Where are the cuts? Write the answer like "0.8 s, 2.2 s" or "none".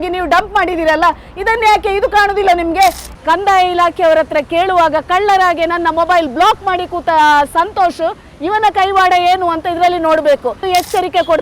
3.2 s, 10.6 s